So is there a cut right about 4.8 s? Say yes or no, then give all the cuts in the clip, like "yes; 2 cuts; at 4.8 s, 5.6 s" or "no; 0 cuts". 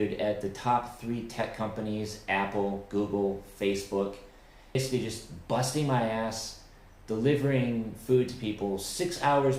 yes; 1 cut; at 4.8 s